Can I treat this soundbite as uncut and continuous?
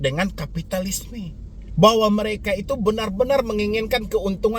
yes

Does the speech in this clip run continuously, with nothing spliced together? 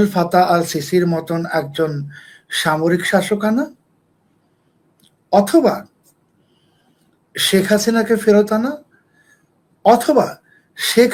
yes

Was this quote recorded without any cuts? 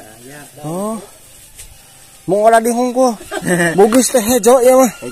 no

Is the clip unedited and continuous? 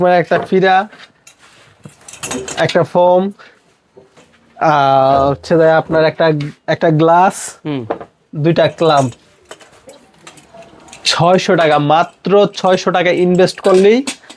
yes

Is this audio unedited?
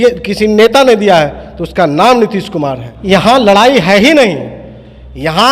no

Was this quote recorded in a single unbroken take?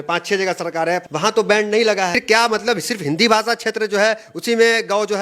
no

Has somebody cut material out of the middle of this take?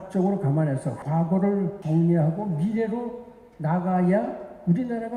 yes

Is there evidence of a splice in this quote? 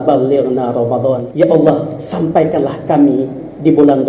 yes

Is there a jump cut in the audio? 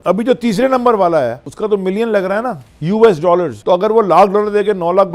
yes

